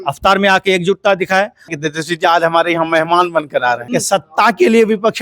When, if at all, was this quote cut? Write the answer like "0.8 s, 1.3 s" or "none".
1.7 s, 3.8 s